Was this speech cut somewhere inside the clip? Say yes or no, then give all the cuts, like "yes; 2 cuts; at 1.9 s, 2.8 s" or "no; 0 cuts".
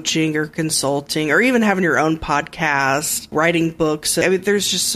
yes; 2 cuts; at 3.3 s, 4.2 s